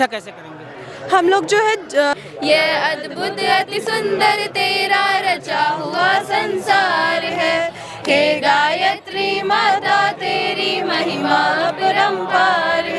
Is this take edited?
yes; 1 cut; at 2.1 s

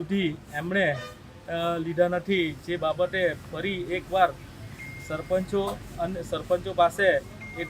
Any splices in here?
no; 0 cuts

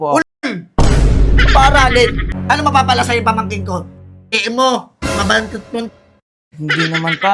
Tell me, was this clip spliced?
yes; 1 cut; at 2.3 s

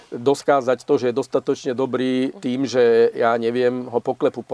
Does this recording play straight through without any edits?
no; 1 cut; at 2.4 s

